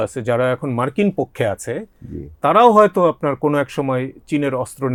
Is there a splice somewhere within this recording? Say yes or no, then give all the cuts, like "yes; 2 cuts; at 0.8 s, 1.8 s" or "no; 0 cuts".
no; 0 cuts